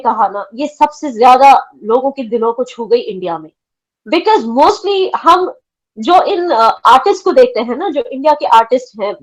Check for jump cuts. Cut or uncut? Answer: uncut